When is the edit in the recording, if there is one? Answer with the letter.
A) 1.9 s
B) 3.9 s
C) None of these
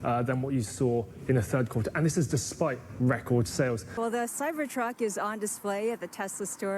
B